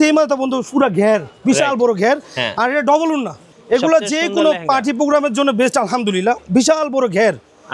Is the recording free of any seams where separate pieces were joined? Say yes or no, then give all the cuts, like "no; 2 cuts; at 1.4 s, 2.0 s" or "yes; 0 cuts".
no; 1 cut; at 3.4 s